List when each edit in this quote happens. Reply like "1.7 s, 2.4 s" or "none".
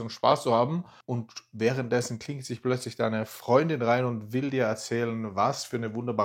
none